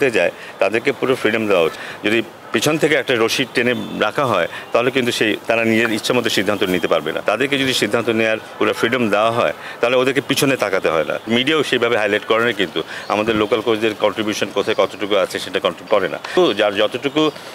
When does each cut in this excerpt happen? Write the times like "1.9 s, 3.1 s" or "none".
1.8 s, 7.2 s, 11.3 s, 16.3 s